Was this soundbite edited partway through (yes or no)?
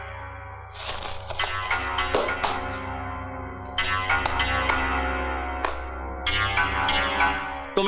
no